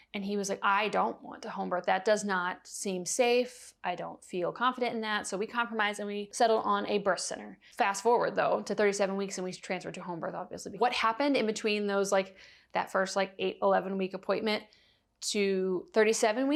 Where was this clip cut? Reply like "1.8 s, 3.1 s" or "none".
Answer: none